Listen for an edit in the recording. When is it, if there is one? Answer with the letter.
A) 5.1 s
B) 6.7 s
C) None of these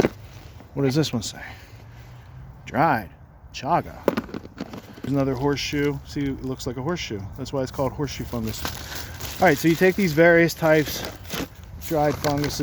A